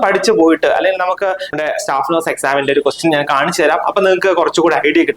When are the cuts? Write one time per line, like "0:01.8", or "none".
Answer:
0:01.5